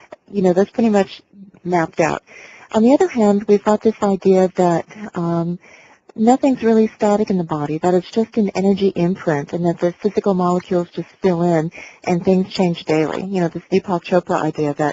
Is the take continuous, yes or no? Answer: no